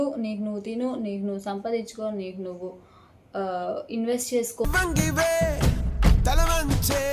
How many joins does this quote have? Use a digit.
1